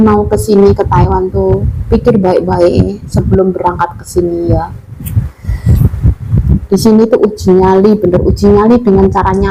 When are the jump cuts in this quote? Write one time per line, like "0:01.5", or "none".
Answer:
none